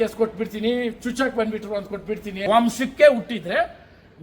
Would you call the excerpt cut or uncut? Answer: cut